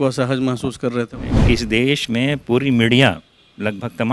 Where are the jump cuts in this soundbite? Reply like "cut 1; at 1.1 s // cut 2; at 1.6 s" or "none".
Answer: cut 1; at 1.3 s